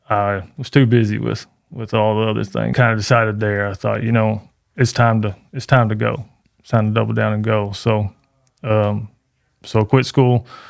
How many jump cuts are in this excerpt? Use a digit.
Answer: 1